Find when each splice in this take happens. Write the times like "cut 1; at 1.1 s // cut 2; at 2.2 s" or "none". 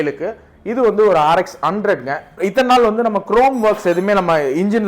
cut 1; at 2.4 s

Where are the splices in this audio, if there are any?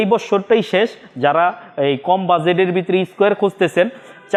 none

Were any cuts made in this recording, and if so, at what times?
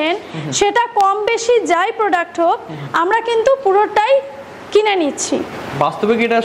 none

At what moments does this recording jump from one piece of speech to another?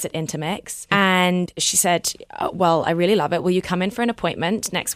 cut 1; at 0.8 s // cut 2; at 1.5 s

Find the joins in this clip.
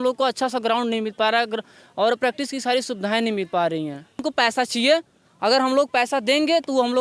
cut 1; at 4.2 s

